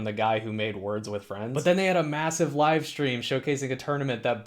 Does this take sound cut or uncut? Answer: cut